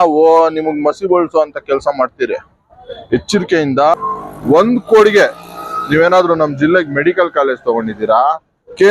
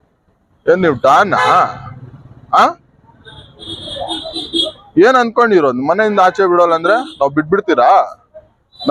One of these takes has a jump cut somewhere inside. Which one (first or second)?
first